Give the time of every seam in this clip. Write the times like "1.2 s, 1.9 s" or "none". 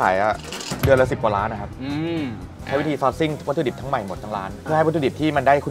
none